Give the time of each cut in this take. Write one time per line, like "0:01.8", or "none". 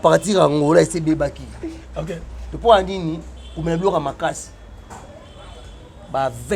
none